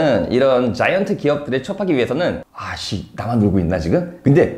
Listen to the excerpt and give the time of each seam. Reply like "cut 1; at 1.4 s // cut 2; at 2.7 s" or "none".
cut 1; at 2.4 s